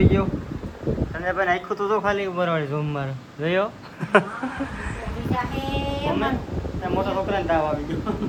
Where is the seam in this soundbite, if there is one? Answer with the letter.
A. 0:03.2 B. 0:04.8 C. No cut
C